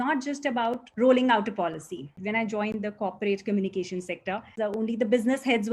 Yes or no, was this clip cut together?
yes